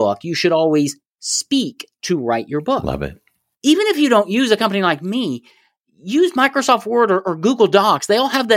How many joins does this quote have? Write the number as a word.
one